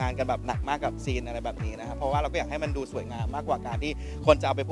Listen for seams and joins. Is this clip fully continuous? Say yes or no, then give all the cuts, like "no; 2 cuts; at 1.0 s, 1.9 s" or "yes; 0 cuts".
yes; 0 cuts